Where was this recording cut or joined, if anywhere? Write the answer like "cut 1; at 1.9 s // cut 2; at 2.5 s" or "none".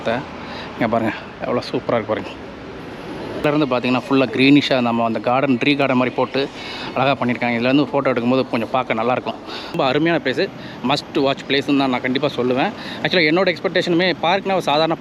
cut 1; at 3.4 s // cut 2; at 9.8 s